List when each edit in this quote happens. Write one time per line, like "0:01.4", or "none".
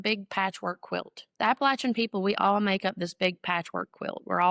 0:01.2